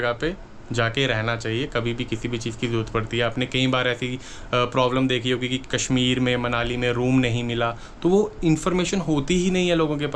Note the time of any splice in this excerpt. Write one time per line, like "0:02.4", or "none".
none

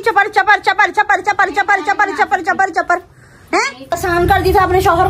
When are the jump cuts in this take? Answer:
0:03.9

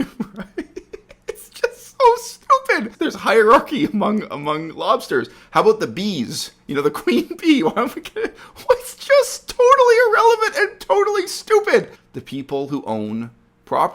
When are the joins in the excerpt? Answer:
0:02.9
0:12.0

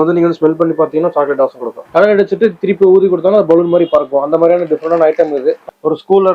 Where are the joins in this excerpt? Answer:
0:01.8
0:05.6

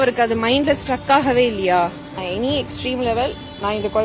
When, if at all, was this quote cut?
0:02.2

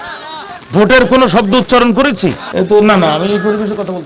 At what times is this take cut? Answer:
0:02.4

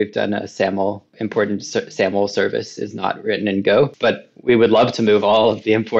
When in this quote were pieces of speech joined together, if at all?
0:01.1

